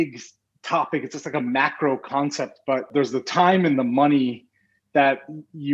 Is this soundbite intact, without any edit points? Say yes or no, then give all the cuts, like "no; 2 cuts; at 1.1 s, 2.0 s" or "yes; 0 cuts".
no; 1 cut; at 2.9 s